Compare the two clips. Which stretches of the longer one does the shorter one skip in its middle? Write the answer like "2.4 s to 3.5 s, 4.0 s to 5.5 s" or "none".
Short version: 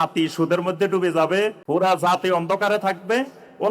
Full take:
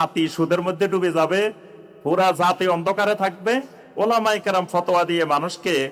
1.6 s to 2.0 s